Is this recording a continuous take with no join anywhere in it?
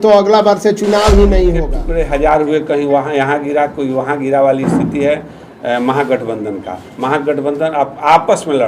no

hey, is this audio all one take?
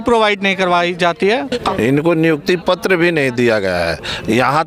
no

